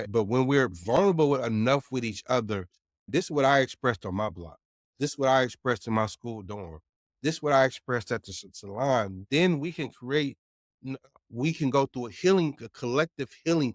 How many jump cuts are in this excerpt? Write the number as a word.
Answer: zero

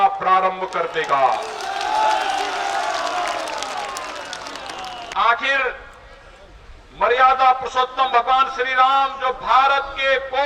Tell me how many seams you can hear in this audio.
one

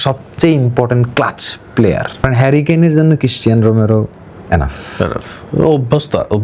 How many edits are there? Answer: one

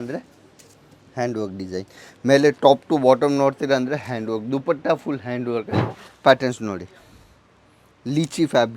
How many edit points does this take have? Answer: one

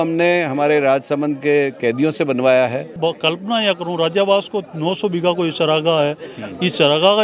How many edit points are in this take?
one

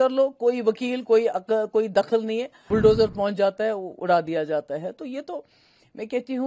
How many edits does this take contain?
one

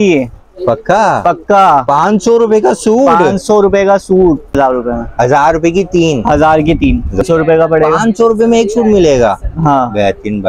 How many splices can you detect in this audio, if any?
two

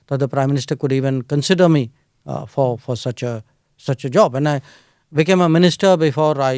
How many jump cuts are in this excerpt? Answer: zero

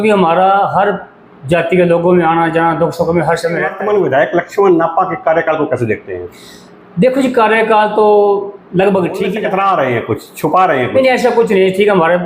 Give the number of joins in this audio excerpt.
two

